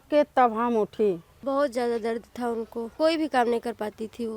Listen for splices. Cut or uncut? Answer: cut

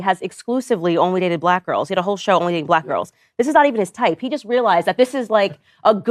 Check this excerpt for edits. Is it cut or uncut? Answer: uncut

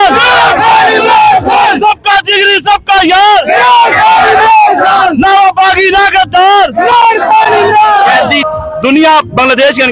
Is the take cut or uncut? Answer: cut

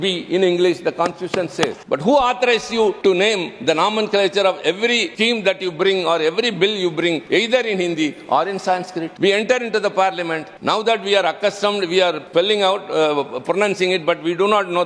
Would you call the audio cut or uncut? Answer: cut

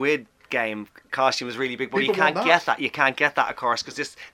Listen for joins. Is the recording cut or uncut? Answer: cut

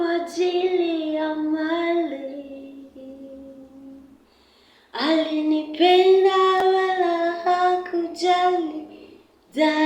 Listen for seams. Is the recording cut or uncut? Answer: uncut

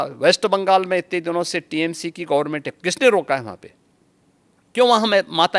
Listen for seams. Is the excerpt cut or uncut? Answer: uncut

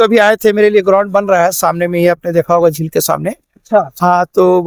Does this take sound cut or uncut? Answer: uncut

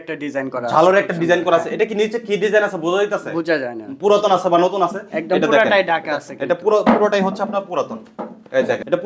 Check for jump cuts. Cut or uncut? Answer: uncut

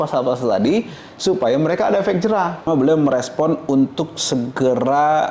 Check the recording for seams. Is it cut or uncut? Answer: cut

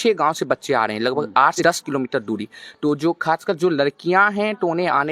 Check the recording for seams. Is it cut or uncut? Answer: cut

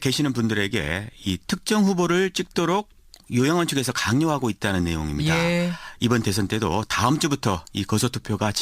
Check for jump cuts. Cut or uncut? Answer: cut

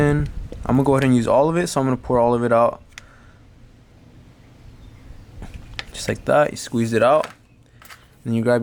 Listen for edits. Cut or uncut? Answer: uncut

